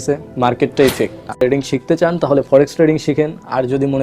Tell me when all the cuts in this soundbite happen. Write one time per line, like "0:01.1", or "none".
0:01.3